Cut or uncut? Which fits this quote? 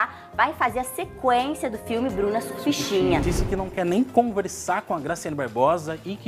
cut